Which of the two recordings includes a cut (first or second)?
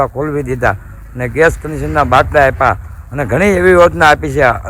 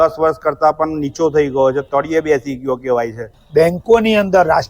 second